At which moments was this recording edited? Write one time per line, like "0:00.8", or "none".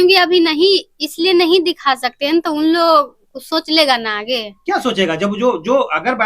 none